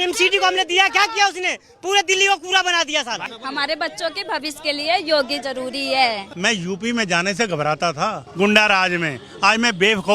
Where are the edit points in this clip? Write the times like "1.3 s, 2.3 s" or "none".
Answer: 3.3 s, 6.3 s, 8.2 s